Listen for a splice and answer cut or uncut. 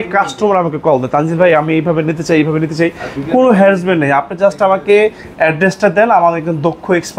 uncut